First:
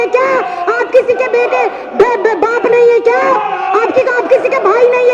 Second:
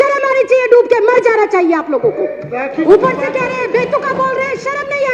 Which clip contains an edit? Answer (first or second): second